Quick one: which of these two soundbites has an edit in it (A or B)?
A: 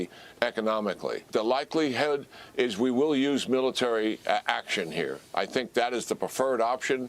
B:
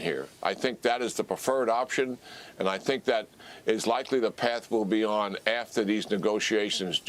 A